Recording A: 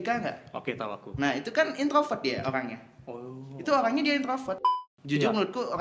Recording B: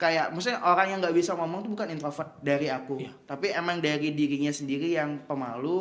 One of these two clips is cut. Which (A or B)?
A